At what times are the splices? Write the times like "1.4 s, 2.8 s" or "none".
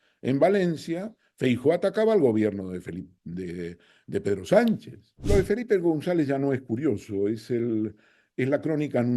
5.2 s